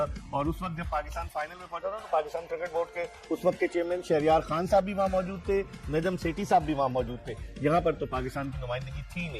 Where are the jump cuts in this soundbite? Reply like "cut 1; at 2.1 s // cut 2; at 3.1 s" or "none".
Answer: cut 1; at 5.8 s